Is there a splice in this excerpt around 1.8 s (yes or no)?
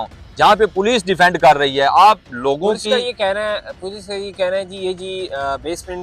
no